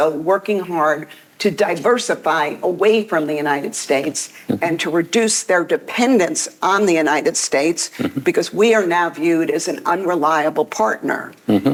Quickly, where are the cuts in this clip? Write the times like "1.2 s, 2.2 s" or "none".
none